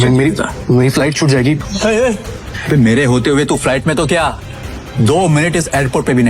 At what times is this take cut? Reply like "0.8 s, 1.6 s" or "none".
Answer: 1.6 s, 2.5 s